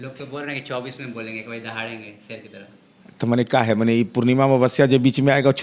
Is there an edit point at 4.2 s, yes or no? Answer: no